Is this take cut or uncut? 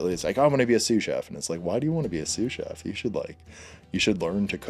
uncut